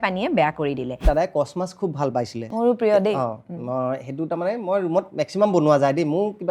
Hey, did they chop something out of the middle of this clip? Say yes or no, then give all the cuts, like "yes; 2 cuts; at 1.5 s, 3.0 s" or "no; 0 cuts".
yes; 1 cut; at 1.0 s